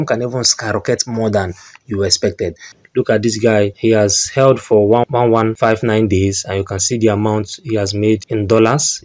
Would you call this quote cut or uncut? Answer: cut